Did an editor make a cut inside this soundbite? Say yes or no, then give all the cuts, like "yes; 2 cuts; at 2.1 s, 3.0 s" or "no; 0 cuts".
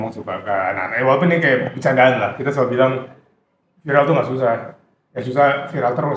no; 0 cuts